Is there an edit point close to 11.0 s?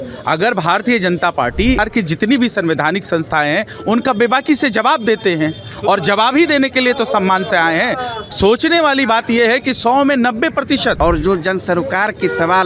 yes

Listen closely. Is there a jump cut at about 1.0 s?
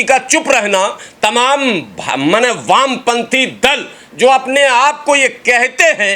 no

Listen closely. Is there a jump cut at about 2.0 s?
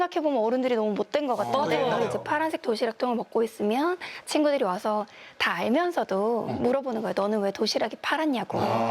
yes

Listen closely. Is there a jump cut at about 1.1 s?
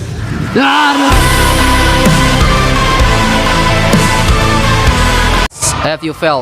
yes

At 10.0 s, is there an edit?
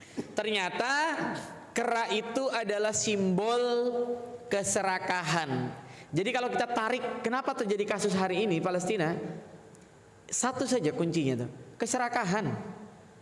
no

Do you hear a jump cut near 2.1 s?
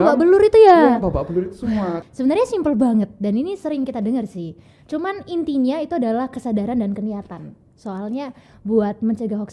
yes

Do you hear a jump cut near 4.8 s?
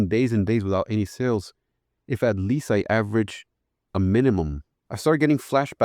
yes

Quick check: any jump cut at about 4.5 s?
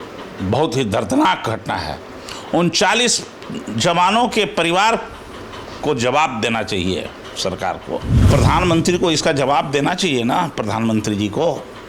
no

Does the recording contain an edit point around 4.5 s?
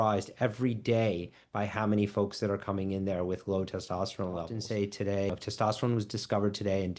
yes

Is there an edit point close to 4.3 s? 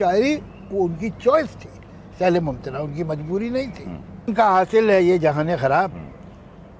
yes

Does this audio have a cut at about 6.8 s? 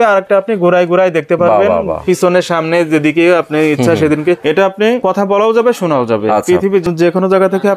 yes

